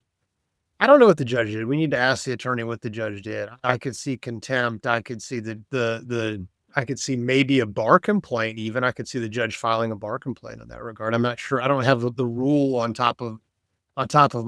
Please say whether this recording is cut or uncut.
cut